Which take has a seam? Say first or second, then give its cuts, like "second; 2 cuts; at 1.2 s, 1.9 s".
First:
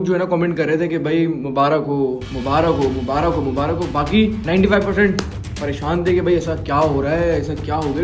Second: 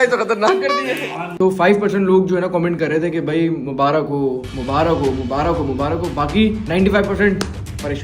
second; 1 cut; at 1.2 s